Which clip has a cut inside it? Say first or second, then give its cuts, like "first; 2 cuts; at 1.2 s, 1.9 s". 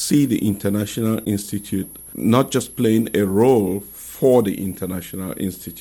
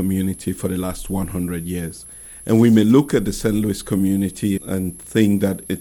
first; 1 cut; at 2.0 s